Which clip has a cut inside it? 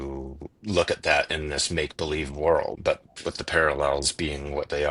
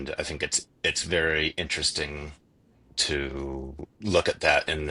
first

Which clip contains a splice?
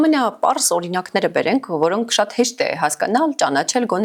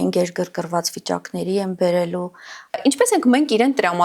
second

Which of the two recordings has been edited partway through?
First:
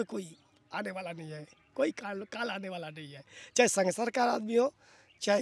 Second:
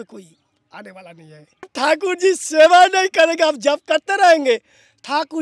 second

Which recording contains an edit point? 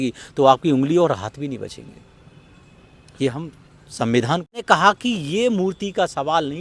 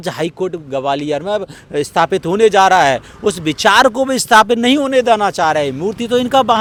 first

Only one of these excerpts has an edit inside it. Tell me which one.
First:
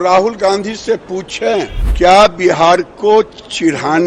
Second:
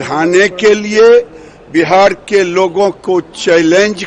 first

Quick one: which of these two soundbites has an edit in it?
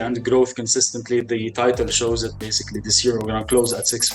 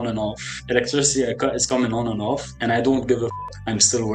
second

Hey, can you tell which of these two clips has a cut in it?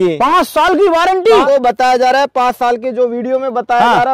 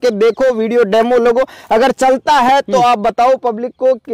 first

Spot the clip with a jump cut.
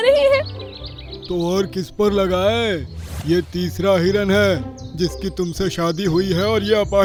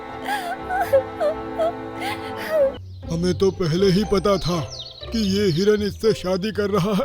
second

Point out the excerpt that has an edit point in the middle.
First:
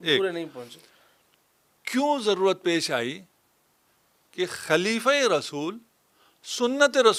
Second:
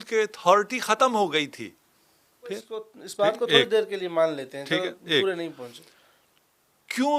second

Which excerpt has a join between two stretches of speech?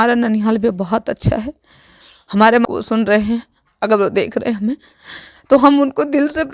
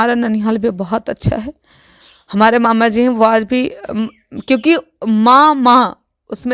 first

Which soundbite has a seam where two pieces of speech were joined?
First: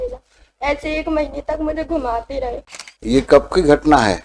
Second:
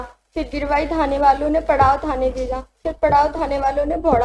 first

